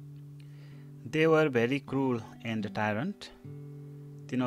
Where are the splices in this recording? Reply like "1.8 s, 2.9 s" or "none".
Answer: 1.1 s